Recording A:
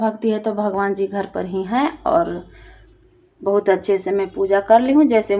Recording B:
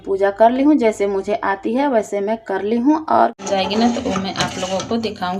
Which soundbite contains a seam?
B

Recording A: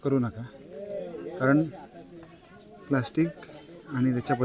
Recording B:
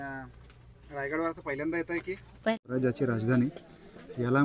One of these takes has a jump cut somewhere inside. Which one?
B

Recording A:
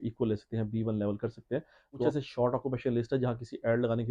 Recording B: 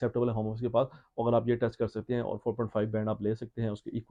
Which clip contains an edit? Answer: A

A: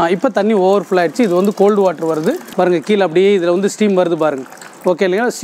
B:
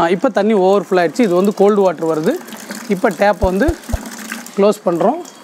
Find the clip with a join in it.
A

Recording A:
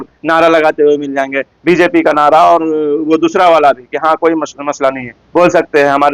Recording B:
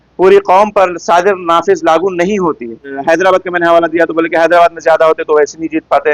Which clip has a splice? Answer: B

